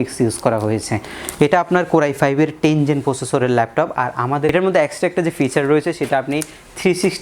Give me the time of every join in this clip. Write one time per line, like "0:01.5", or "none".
0:04.5